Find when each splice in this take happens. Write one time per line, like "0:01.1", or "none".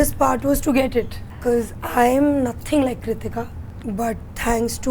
0:01.2
0:03.6